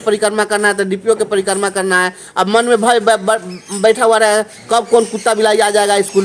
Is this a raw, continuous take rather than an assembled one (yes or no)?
yes